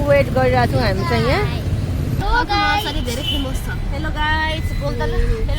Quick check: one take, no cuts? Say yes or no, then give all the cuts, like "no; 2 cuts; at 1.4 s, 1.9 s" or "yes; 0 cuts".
no; 1 cut; at 2.2 s